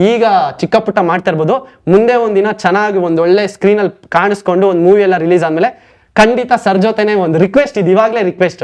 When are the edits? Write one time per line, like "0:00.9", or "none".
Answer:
none